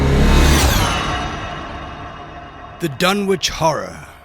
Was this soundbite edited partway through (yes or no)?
yes